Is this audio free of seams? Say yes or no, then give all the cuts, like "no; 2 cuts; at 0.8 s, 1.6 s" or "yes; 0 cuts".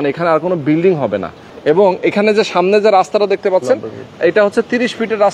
yes; 0 cuts